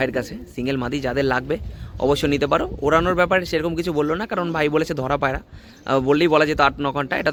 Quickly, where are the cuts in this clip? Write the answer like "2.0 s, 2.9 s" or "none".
none

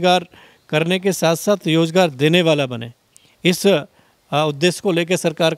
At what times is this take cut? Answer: none

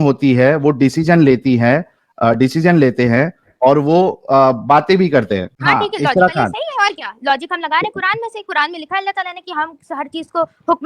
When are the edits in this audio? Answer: 5.5 s

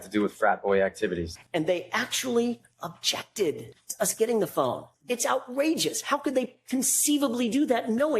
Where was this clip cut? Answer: 1.3 s, 3.8 s, 4.9 s

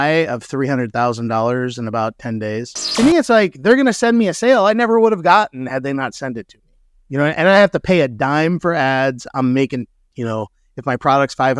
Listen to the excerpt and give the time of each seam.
2.8 s

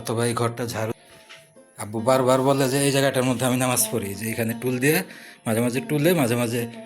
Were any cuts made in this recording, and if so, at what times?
0.9 s

